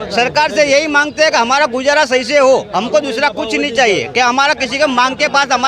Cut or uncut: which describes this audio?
uncut